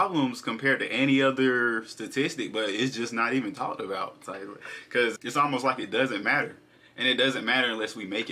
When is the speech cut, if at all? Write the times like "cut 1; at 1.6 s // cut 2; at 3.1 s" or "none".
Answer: cut 1; at 5.2 s